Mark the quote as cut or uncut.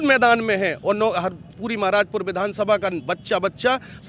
uncut